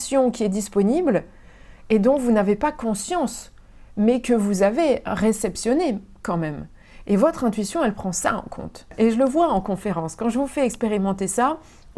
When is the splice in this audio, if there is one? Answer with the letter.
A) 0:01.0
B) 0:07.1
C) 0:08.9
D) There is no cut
C